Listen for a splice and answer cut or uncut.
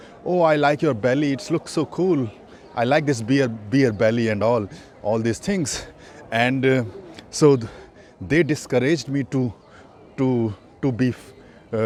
uncut